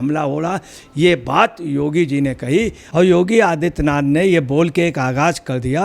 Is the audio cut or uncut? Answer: cut